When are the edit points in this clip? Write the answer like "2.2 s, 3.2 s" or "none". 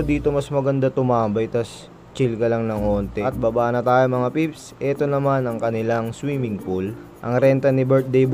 3.2 s, 7.1 s